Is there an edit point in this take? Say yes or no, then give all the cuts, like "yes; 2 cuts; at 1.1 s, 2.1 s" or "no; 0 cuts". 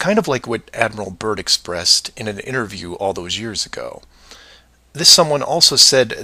yes; 1 cut; at 1.9 s